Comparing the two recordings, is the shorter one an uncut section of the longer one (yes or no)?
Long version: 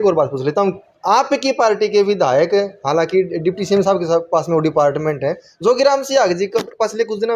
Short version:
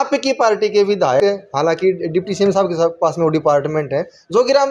no